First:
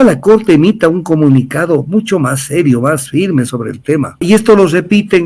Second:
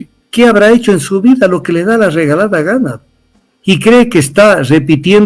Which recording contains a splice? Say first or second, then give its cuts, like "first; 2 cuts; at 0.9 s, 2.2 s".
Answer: first; 1 cut; at 4.2 s